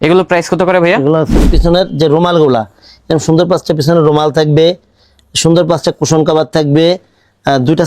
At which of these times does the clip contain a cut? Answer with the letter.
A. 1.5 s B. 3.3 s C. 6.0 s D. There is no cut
A